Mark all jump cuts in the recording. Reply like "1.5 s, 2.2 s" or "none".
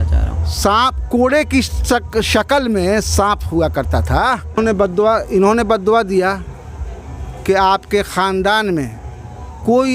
4.7 s